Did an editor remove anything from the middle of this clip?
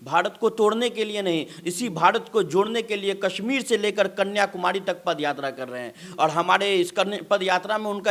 no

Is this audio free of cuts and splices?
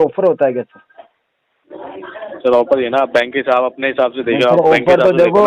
yes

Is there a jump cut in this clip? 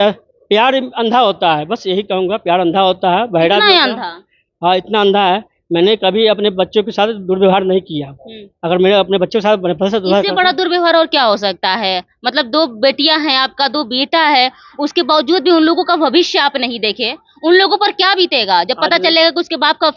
no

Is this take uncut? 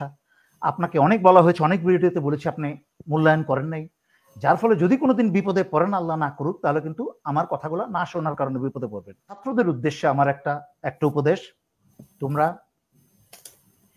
no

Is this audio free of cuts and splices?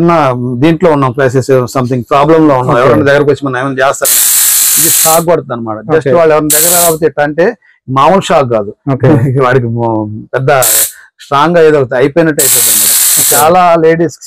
yes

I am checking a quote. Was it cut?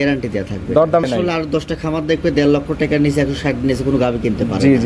yes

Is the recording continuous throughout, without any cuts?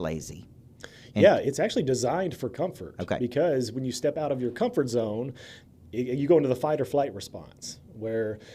yes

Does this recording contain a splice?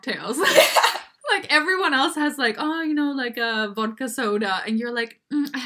yes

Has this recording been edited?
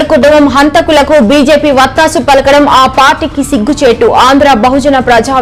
no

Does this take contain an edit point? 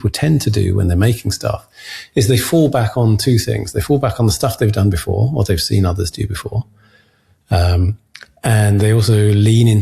no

